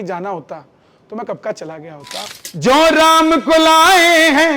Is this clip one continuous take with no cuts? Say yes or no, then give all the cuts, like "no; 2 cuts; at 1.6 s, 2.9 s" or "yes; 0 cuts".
no; 1 cut; at 2.4 s